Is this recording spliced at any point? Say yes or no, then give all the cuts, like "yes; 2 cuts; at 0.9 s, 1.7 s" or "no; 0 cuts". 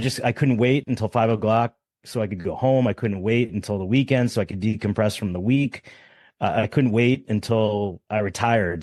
no; 0 cuts